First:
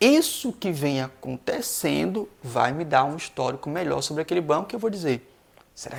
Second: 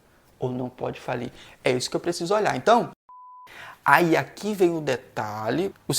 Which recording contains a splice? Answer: second; 1 cut; at 3.2 s

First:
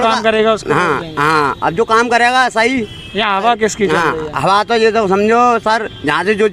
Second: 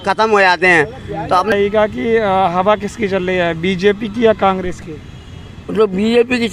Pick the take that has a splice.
second; 1 cut; at 1.5 s

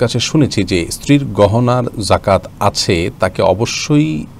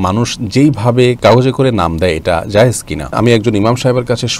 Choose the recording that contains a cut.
second; 2 cuts; at 1.2 s, 3.1 s

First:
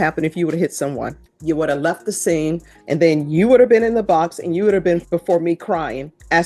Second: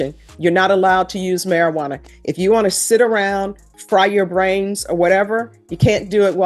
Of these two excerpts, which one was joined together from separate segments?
first; 3 cuts; at 1.3 s, 2.7 s, 5.0 s

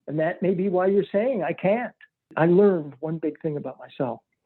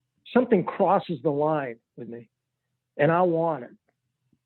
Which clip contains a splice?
first; 1 cut; at 2.3 s

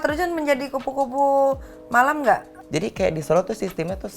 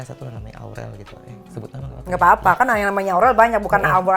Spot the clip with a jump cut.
first; 1 cut; at 2.6 s

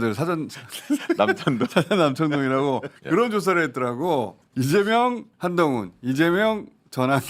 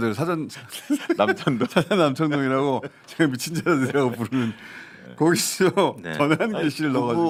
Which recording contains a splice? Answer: first; 3 cuts; at 3.0 s, 4.4 s, 5.3 s

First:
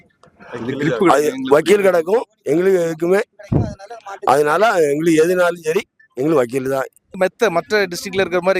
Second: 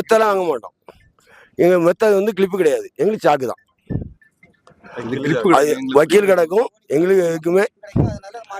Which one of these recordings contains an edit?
first; 1 cut; at 7.2 s

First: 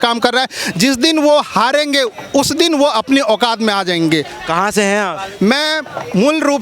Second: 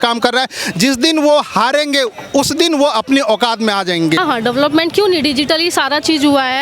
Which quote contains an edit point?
second; 1 cut; at 4.2 s

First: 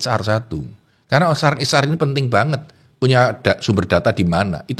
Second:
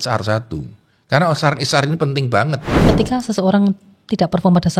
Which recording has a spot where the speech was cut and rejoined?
second; 1 cut; at 2.8 s

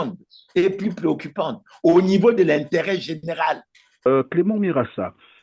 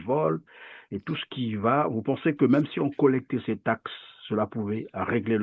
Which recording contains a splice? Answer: first; 1 cut; at 4.1 s

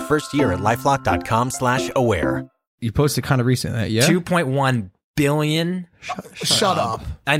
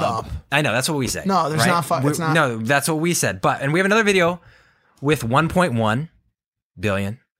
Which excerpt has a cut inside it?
first; 1 cut; at 2.7 s

